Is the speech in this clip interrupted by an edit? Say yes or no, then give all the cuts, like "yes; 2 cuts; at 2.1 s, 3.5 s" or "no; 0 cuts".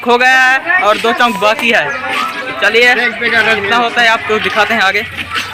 no; 0 cuts